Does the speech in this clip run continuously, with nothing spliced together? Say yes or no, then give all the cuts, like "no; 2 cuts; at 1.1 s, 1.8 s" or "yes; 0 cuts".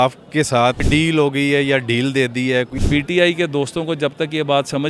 no; 2 cuts; at 0.8 s, 2.8 s